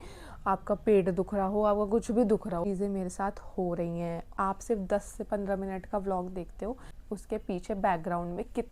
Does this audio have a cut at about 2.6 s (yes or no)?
yes